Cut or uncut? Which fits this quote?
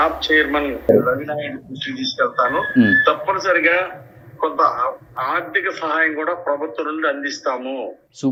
uncut